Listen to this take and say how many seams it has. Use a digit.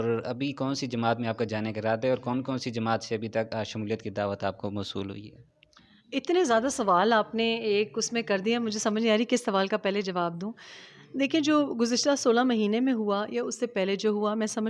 0